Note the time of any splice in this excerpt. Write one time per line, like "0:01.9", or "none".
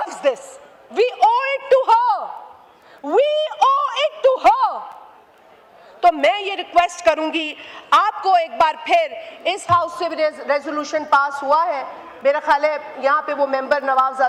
none

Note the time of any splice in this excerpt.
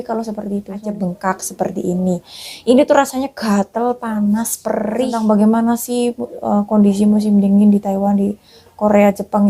0:00.9
0:05.2

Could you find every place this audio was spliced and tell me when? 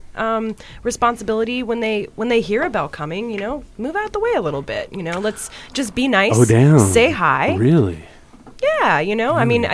none

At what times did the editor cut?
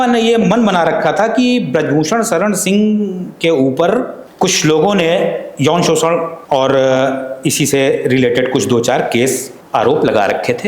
0:04.2
0:06.3
0:09.5

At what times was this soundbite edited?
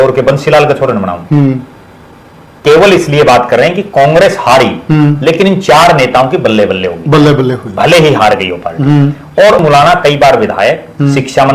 0:02.6
0:09.6

